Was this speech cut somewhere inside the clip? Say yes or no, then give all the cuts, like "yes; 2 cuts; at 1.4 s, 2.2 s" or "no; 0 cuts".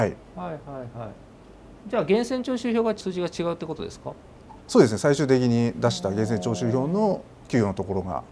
no; 0 cuts